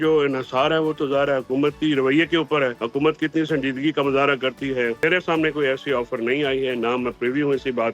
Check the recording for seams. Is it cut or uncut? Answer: cut